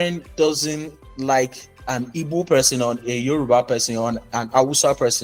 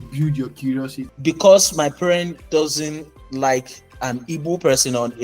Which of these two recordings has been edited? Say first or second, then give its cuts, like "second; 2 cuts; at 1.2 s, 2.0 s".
second; 1 cut; at 1.1 s